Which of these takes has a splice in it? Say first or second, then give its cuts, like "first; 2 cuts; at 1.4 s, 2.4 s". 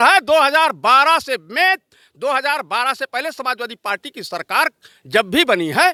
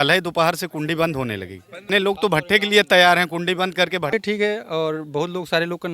second; 2 cuts; at 1.8 s, 4.1 s